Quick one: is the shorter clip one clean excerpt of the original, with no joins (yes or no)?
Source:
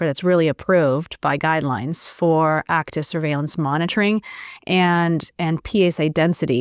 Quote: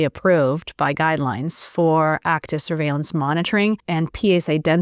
no